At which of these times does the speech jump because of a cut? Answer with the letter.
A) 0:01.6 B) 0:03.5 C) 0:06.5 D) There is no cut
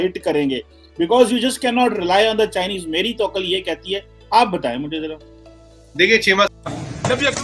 C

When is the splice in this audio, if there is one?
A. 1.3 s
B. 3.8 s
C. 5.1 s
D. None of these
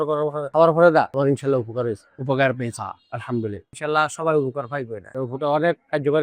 B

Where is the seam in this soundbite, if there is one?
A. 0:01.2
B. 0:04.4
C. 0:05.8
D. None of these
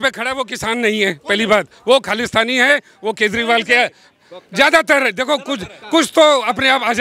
D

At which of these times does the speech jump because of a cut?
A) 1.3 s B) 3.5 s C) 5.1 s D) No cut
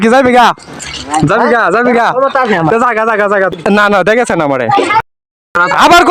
B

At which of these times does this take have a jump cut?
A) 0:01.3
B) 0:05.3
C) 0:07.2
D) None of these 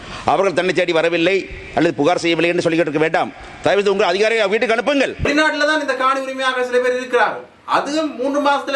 B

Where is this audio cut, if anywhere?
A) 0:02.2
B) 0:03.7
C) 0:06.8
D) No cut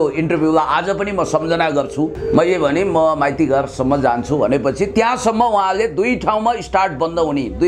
A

